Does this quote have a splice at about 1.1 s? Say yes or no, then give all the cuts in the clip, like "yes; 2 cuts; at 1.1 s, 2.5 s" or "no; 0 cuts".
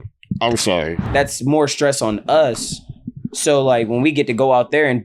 yes; 1 cut; at 1.1 s